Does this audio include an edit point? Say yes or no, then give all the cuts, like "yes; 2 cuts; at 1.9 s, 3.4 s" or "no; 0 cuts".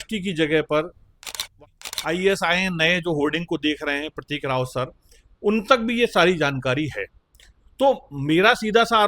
yes; 1 cut; at 1.6 s